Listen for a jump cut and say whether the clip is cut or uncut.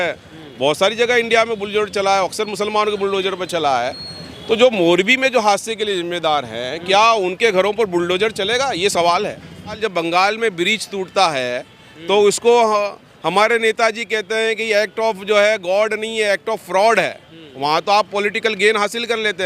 cut